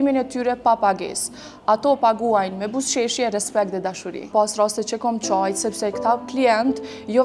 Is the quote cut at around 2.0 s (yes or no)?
no